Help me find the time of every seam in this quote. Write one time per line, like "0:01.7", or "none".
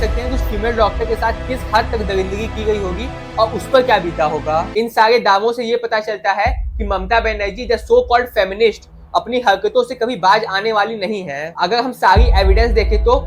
0:04.7